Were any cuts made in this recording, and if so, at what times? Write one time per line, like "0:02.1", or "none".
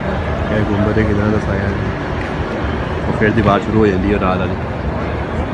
none